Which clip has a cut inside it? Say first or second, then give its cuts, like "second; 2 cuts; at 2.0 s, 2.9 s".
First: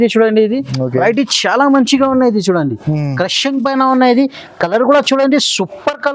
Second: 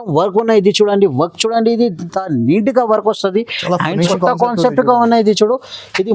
second; 1 cut; at 4.1 s